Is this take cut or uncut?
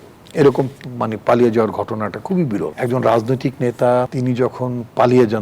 cut